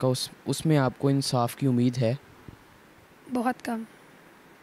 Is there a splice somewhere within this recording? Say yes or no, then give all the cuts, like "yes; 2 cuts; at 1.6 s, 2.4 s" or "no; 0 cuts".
no; 0 cuts